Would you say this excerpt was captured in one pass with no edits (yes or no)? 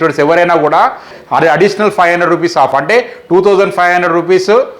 no